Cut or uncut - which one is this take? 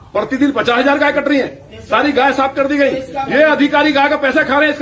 uncut